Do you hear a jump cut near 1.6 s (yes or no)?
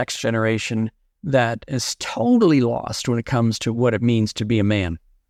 no